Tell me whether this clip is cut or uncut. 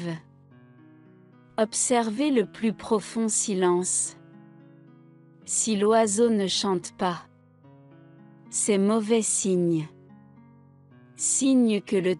uncut